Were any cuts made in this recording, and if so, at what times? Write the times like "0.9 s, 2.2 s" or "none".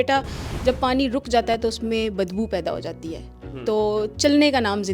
none